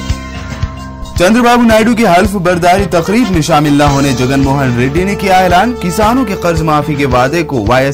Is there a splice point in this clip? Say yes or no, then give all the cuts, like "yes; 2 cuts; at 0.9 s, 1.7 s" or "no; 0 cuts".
yes; 1 cut; at 0.9 s